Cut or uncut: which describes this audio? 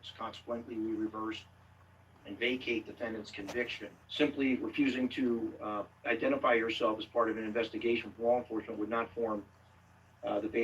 cut